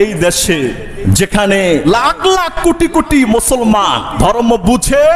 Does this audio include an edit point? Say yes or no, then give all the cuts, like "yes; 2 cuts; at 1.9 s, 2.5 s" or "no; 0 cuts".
yes; 3 cuts; at 0.9 s, 1.9 s, 4.1 s